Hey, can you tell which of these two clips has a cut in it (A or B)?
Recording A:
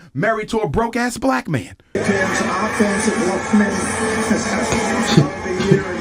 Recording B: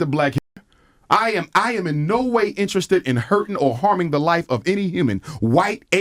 A